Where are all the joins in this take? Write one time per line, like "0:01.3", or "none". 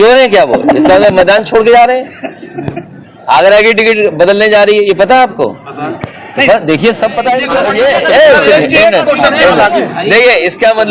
0:07.5